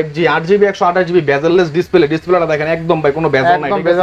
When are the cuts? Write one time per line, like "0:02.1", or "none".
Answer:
none